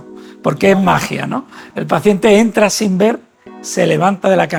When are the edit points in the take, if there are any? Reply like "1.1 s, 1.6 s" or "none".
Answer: none